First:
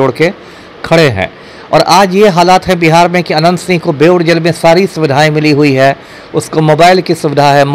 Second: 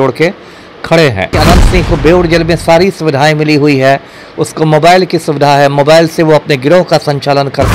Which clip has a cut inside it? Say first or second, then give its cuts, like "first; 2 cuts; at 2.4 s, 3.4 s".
second; 1 cut; at 1.3 s